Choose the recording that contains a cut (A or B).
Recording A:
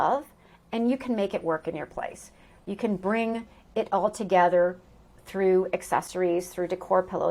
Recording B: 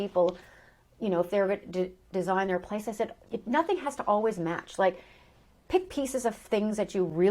B